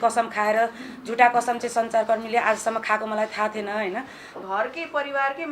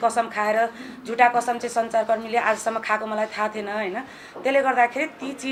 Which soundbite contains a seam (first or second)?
first